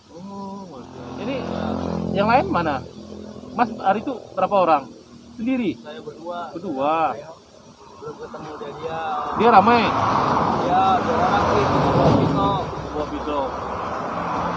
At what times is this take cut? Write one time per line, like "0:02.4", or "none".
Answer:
0:01.1